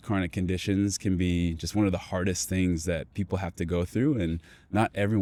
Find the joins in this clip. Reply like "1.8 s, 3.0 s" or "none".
none

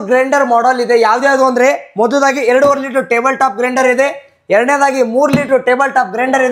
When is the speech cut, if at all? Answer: none

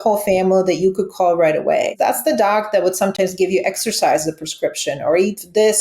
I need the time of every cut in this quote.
1.9 s

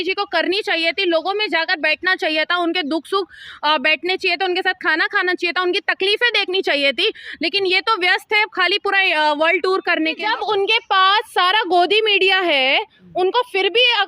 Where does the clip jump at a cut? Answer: 10.2 s

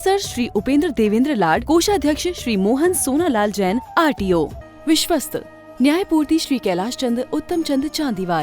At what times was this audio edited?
4.6 s

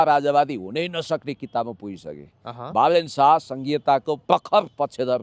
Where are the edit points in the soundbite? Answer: 4.2 s

